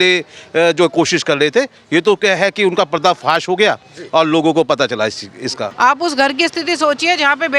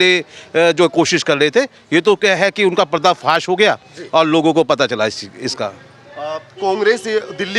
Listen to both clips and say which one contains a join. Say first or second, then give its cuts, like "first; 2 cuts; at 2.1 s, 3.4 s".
first; 1 cut; at 5.7 s